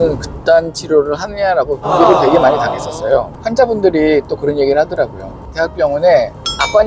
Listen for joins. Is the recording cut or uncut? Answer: cut